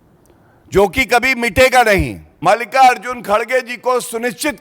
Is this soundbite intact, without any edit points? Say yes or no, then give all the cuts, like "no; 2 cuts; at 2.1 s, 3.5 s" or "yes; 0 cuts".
no; 1 cut; at 2.2 s